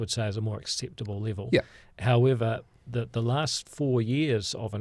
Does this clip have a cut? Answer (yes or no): no